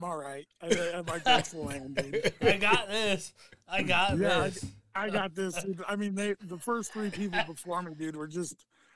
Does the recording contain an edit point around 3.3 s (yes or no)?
no